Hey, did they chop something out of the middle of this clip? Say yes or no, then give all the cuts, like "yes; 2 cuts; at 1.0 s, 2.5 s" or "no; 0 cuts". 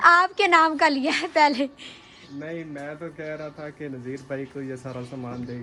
no; 0 cuts